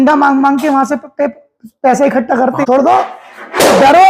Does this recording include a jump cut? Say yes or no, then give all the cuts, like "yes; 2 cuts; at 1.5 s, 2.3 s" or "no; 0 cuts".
yes; 1 cut; at 2.6 s